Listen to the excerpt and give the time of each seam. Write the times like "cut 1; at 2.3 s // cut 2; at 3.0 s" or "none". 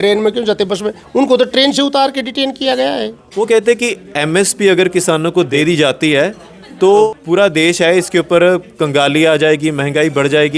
cut 1; at 3.2 s // cut 2; at 5.5 s // cut 3; at 7.1 s